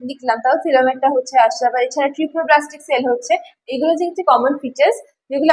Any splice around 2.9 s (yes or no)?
no